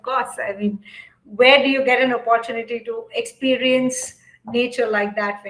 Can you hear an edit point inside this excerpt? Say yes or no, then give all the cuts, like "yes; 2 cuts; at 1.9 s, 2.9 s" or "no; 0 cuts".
no; 0 cuts